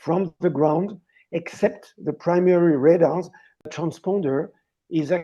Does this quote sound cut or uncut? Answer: cut